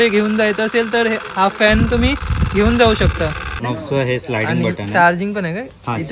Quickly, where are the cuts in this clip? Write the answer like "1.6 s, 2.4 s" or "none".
3.6 s